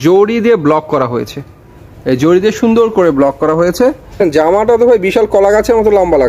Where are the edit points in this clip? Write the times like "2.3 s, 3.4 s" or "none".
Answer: 4.2 s